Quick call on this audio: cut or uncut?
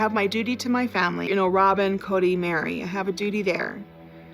cut